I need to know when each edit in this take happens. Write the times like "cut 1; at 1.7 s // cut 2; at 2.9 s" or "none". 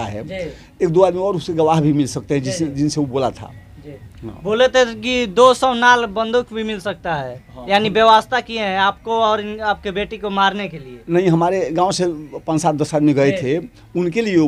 none